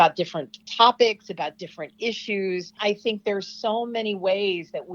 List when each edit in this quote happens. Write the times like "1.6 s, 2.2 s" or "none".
2.8 s